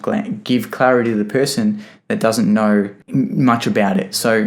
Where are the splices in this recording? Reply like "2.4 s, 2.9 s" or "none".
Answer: 3.0 s